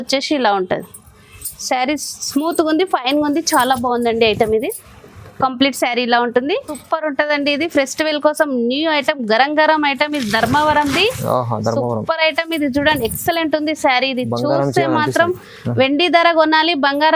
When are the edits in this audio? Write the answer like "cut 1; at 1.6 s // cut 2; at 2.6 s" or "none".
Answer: cut 1; at 6.8 s